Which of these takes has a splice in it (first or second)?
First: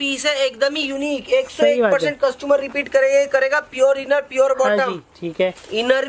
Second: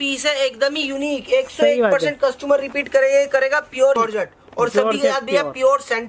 second